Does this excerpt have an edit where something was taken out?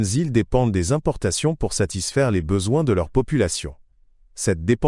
yes; 1 cut; at 1.2 s

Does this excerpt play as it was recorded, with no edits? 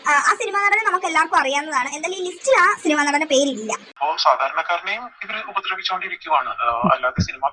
no; 1 cut; at 3.9 s

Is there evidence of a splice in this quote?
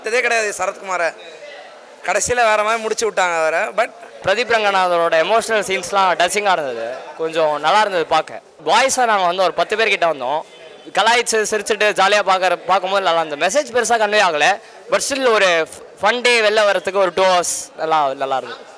yes; 2 cuts; at 4.1 s, 8.5 s

